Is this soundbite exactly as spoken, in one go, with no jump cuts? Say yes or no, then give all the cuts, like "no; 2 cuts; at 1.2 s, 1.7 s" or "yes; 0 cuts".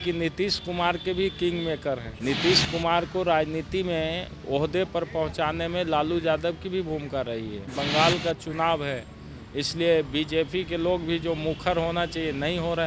no; 2 cuts; at 2.1 s, 7.7 s